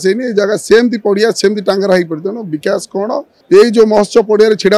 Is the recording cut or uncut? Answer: cut